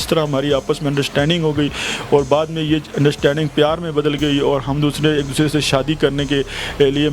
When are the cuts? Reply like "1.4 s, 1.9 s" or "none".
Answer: none

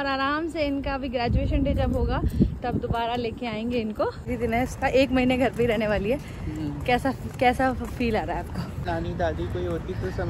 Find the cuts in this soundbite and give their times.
4.3 s, 8.8 s

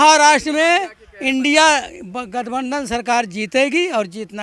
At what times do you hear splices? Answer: none

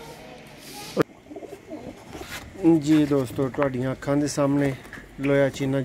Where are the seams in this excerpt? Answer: 1.0 s

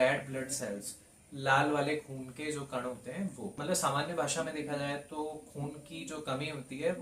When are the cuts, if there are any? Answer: none

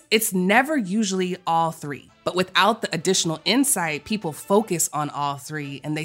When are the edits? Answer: 2.1 s

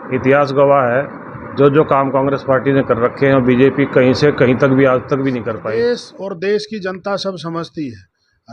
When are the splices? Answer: 5.5 s

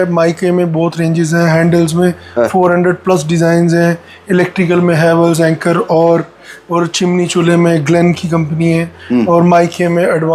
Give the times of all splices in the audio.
none

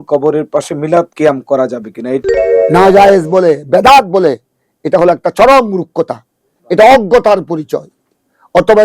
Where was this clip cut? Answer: 1.1 s, 2.2 s

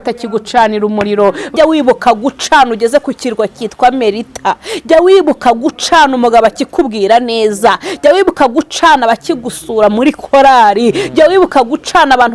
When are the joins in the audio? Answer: 1.5 s

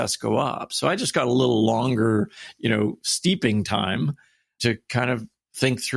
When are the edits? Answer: 4.6 s

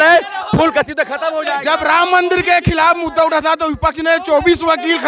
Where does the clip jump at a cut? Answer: none

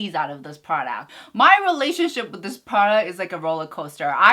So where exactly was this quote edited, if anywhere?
1.0 s

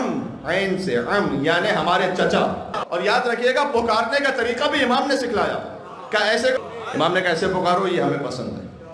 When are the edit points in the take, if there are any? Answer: 2.7 s, 6.6 s

